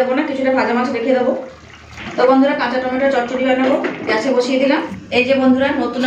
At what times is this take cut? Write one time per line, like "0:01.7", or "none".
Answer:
0:02.0
0:05.0